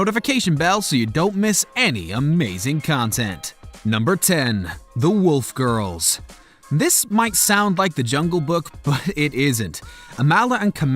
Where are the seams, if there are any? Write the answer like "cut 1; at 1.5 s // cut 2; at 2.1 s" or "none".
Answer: cut 1; at 4.7 s